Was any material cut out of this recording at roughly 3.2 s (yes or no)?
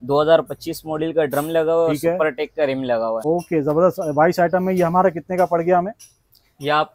yes